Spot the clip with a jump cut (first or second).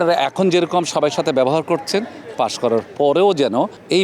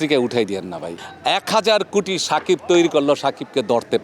second